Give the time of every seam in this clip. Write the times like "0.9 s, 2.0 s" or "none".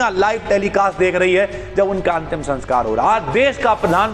none